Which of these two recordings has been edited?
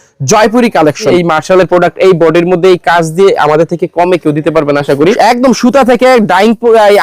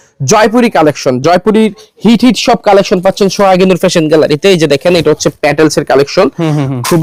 first; 2 cuts; at 1.1 s, 5.2 s

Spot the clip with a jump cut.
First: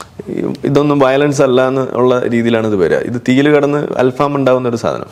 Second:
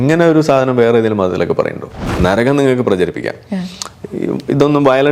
second; 1 cut; at 2.1 s

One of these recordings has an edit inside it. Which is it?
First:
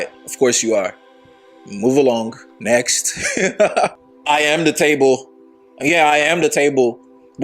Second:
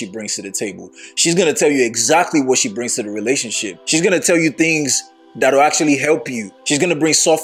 first; 1 cut; at 4.0 s

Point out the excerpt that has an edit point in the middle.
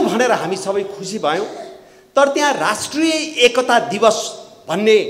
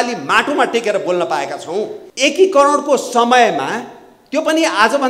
second; 1 cut; at 2.0 s

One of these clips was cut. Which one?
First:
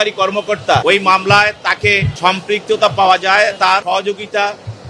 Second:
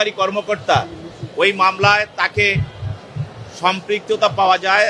first; 3 cuts; at 0.8 s, 2.1 s, 3.8 s

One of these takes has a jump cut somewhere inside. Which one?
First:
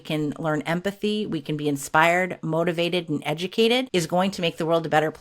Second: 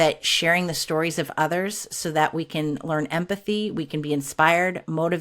first; 1 cut; at 3.9 s

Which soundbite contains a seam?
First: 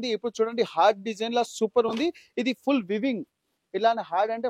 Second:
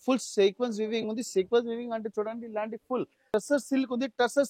second; 1 cut; at 3.3 s

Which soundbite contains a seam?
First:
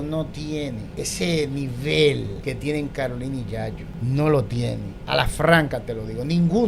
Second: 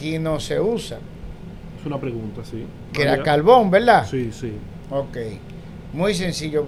first; 4 cuts; at 0.9 s, 2.3 s, 3.9 s, 4.9 s

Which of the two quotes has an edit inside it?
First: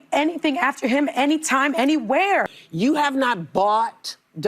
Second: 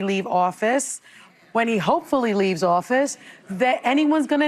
first; 1 cut; at 2.5 s

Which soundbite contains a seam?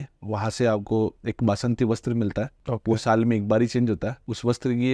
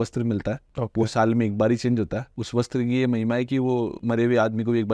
second; 1 cut; at 4.0 s

